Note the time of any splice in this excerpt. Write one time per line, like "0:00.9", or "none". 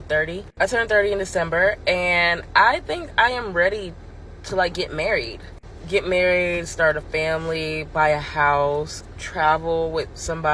none